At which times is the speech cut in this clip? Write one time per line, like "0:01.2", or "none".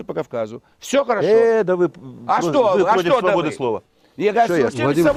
none